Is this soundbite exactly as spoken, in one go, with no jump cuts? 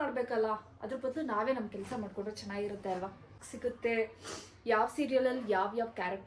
no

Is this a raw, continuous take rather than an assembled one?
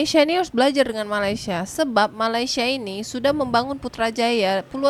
yes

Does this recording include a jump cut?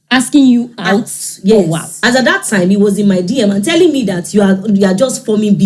yes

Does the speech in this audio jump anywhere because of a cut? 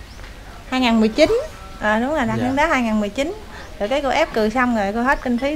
no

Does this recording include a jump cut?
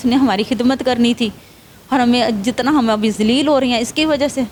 no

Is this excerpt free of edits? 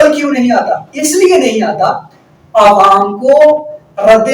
yes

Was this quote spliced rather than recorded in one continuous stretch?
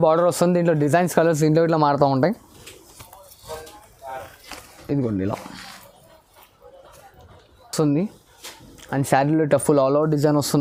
no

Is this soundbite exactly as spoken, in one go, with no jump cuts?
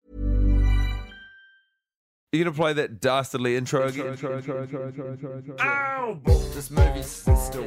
no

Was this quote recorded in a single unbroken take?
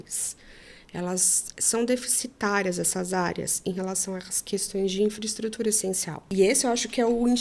no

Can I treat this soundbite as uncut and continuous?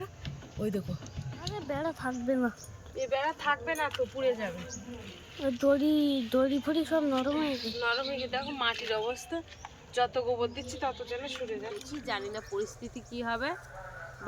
no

